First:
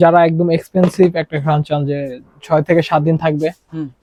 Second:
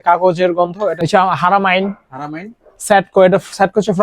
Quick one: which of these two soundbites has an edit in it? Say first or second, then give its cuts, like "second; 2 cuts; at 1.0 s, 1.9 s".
second; 1 cut; at 1.0 s